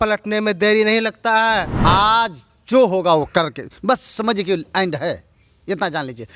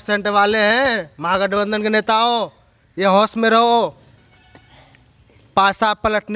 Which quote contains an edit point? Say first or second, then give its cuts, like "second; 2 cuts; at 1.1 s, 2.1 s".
first; 1 cut; at 1.7 s